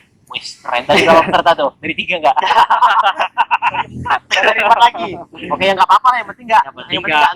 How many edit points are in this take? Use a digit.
0